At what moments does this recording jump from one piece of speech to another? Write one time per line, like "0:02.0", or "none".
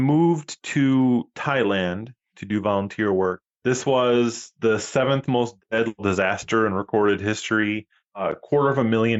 none